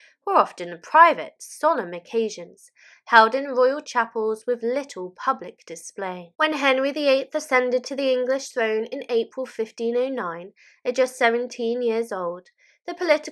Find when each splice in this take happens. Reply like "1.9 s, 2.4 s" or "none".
6.3 s

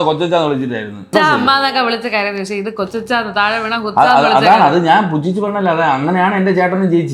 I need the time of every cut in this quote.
1.0 s

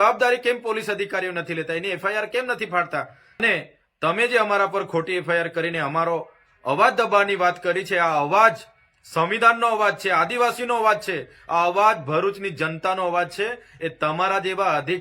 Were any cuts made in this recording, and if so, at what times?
3.4 s

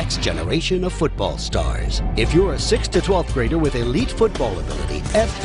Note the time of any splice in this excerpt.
none

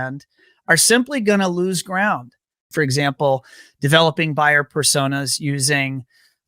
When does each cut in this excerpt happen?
2.7 s

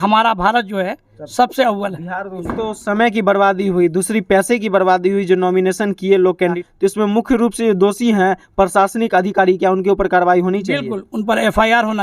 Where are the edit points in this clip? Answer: 2.4 s, 6.6 s

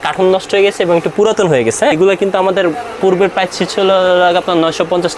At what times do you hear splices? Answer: 1.9 s

